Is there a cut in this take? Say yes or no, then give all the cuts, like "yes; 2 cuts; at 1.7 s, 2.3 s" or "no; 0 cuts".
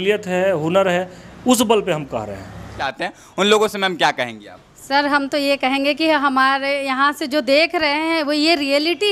yes; 1 cut; at 2.8 s